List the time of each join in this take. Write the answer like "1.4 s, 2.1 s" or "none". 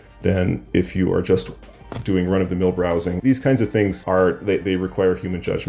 3.2 s, 4.0 s